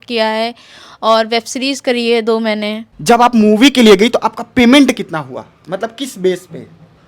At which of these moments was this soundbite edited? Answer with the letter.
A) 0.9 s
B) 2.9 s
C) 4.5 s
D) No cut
B